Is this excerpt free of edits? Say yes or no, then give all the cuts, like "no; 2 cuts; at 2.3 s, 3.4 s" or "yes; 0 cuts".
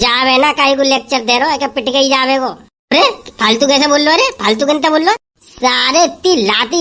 yes; 0 cuts